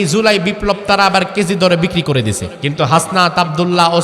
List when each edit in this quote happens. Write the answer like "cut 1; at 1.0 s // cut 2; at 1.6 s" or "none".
cut 1; at 2.5 s

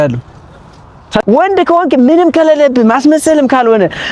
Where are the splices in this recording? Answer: cut 1; at 1.2 s

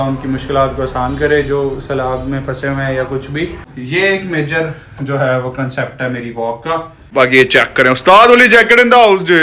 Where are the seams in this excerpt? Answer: cut 1; at 3.7 s // cut 2; at 7.0 s

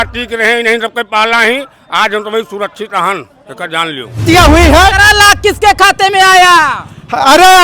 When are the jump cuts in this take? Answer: cut 1; at 4.2 s

